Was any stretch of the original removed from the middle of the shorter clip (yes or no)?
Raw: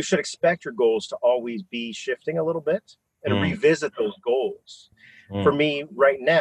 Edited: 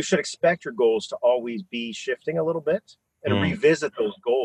no